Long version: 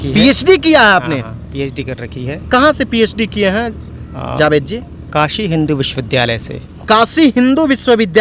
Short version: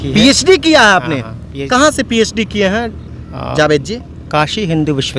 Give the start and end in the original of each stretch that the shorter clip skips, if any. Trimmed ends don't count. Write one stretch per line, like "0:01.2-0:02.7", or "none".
0:01.6-0:02.4